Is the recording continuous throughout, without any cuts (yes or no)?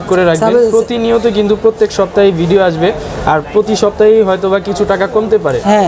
yes